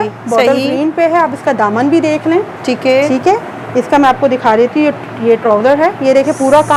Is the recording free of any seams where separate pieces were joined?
yes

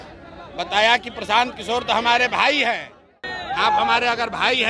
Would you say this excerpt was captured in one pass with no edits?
no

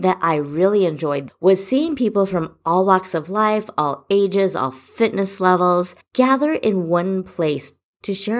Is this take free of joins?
no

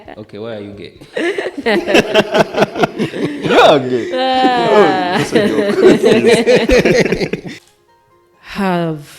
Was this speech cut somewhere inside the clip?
yes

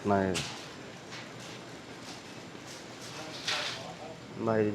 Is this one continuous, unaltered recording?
yes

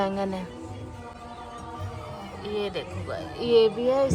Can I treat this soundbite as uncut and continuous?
yes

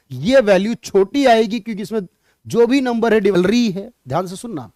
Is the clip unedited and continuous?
no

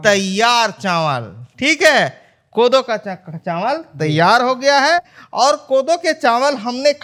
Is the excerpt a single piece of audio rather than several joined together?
yes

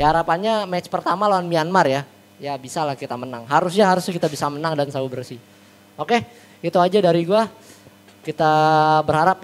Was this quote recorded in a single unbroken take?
yes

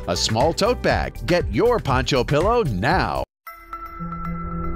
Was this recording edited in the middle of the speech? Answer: yes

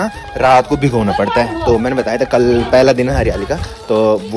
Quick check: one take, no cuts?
yes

